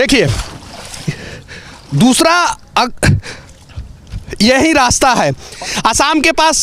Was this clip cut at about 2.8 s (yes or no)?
no